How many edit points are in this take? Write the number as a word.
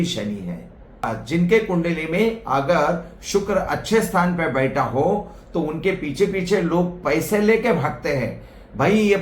one